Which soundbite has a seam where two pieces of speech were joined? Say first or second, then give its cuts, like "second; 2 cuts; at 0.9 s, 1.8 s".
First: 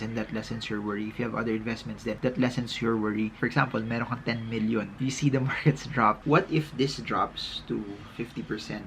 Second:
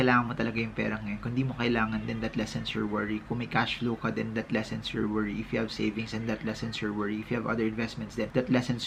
first; 1 cut; at 6.2 s